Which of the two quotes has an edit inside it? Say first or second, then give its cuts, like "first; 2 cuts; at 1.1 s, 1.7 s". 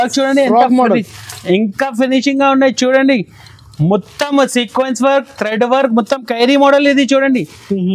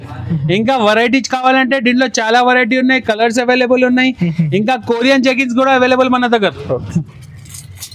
second; 1 cut; at 6.9 s